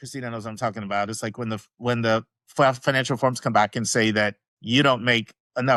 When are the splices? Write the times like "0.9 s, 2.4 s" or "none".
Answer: none